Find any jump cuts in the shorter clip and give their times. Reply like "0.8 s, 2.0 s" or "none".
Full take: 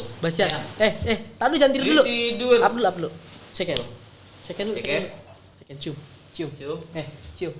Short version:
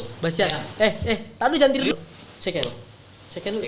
1.9 s

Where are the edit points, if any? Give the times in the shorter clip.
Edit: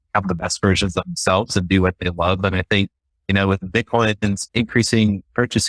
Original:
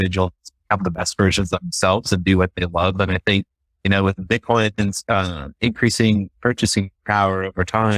4.4 s

